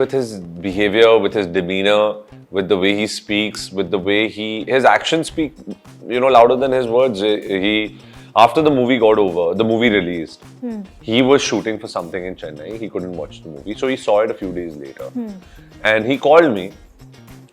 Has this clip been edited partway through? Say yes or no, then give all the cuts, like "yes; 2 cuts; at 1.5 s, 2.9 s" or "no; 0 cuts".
no; 0 cuts